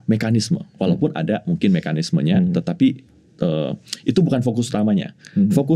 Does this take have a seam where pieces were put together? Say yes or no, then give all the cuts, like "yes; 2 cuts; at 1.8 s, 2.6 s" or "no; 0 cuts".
no; 0 cuts